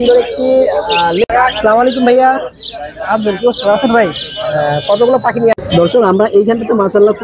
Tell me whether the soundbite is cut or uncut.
cut